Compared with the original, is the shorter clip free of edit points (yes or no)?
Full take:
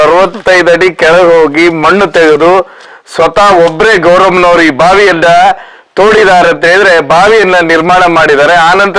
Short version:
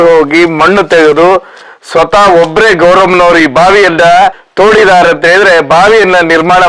no